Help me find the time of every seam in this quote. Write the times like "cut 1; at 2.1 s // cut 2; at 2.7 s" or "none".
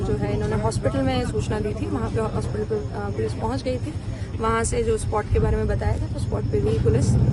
none